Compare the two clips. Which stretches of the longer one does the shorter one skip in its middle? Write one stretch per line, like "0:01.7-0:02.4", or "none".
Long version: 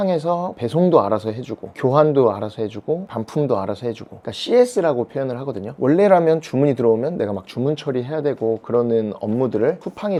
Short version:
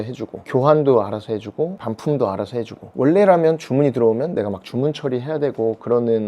0:04.1-0:05.6